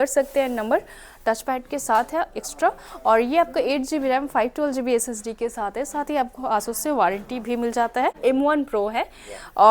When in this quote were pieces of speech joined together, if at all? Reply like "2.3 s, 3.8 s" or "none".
8.2 s